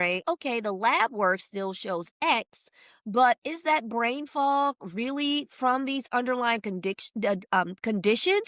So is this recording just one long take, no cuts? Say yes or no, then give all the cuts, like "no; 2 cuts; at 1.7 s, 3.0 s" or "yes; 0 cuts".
yes; 0 cuts